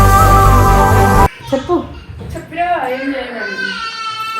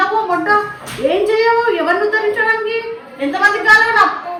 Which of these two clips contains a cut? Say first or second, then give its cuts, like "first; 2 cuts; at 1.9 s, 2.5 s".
first; 1 cut; at 1.4 s